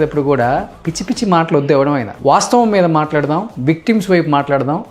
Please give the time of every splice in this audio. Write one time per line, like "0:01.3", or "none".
0:02.1

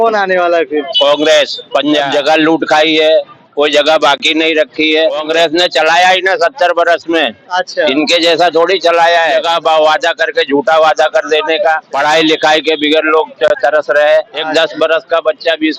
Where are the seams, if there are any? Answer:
0:02.1
0:05.2
0:09.4
0:11.9
0:14.4

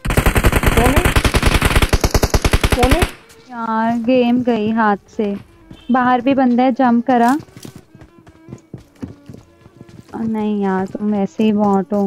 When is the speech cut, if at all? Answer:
0:03.7

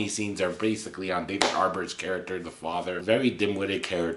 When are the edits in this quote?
0:03.0

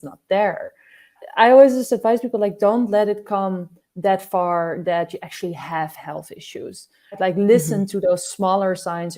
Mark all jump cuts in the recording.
0:01.2
0:07.2

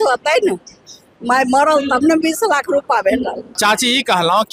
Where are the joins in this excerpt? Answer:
0:03.4

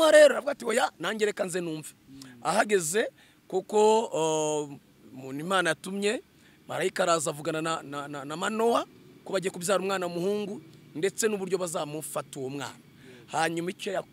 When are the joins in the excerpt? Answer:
none

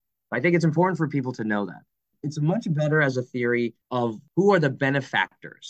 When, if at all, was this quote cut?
0:02.2
0:04.1

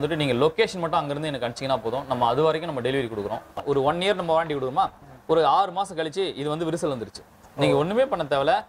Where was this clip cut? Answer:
0:03.6

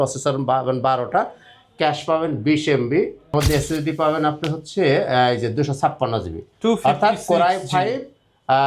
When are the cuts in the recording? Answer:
0:03.3

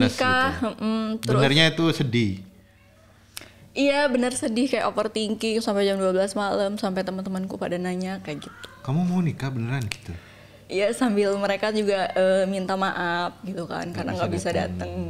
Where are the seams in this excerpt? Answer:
none

